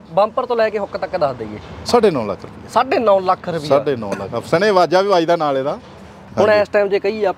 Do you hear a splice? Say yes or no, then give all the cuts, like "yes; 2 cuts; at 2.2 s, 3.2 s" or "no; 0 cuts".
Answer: yes; 1 cut; at 6.2 s